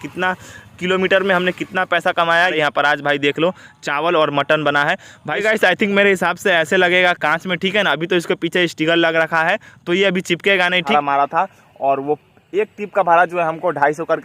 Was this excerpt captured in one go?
no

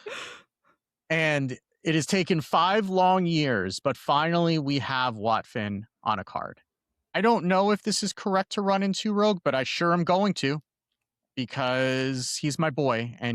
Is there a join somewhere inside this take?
yes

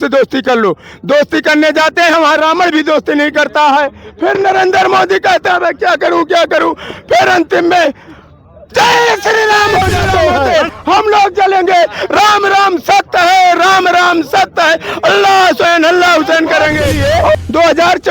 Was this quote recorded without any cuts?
no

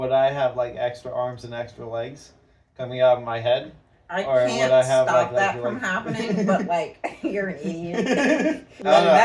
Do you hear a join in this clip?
no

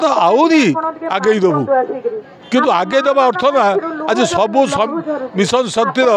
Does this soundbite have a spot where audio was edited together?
no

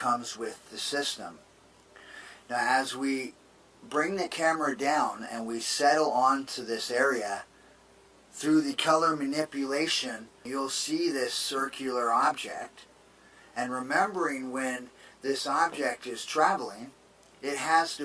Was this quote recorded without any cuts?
no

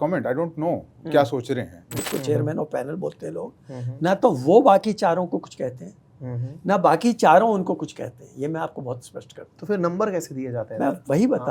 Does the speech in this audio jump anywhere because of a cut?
yes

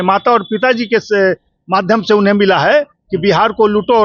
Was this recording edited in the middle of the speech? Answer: no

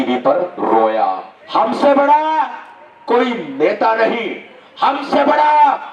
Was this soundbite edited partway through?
yes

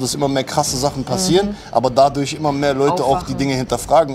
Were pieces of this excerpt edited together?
no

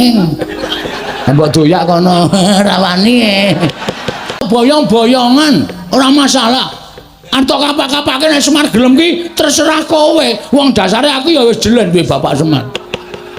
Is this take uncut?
no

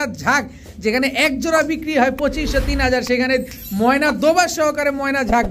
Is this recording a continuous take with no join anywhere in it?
yes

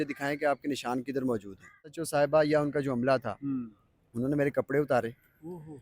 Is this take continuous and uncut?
no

